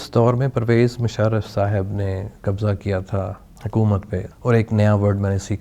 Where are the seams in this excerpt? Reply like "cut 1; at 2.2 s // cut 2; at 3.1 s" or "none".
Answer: cut 1; at 3.5 s // cut 2; at 4.3 s